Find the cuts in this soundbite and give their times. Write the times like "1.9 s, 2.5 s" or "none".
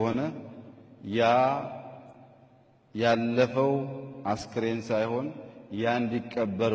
none